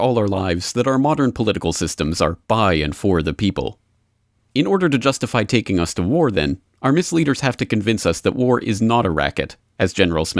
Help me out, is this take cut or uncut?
cut